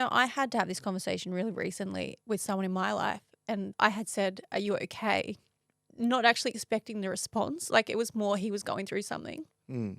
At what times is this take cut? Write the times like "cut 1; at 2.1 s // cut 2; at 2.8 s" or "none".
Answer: cut 1; at 2.2 s